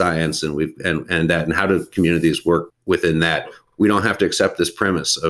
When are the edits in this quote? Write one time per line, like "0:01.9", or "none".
0:02.7
0:03.6